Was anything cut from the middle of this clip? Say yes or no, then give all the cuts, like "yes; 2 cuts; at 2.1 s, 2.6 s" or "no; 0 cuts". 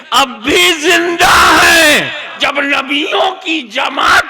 yes; 1 cut; at 2.4 s